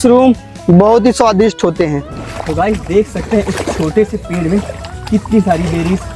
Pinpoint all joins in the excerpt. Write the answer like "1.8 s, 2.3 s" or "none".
2.2 s